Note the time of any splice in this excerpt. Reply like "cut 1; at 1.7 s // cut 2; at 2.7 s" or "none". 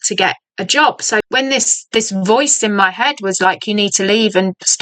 cut 1; at 1.2 s